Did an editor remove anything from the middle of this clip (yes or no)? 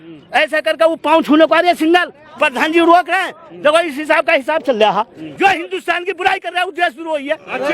yes